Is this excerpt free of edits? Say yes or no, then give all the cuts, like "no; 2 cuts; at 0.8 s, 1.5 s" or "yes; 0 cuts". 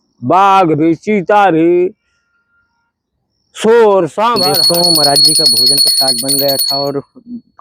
no; 1 cut; at 4.4 s